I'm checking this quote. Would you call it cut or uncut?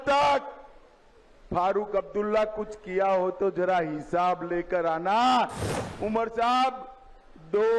cut